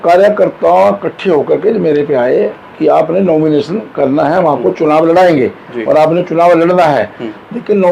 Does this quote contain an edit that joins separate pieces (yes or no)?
no